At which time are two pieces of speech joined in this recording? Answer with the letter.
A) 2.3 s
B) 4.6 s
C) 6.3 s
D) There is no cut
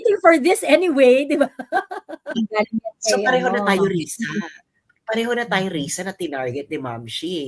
A